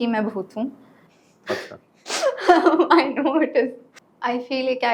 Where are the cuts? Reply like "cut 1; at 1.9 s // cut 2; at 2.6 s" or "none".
cut 1; at 3.9 s